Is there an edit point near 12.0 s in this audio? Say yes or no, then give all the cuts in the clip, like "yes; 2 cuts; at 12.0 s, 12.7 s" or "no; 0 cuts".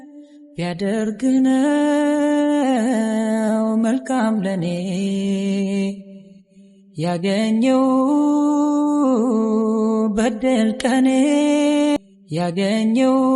yes; 1 cut; at 12.0 s